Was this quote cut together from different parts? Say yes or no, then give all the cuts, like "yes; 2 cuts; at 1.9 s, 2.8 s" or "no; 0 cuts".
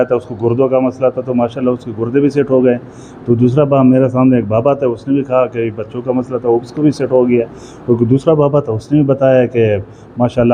no; 0 cuts